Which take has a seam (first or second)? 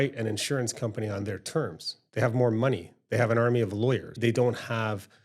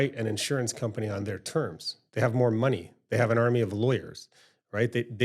first